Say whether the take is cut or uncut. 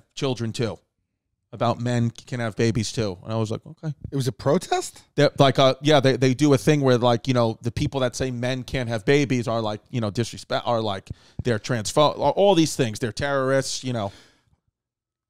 uncut